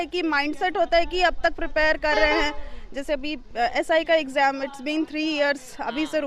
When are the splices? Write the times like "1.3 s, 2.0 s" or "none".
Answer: none